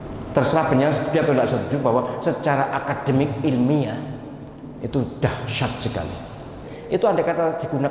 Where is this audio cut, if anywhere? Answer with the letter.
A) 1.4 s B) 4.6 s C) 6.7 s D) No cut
C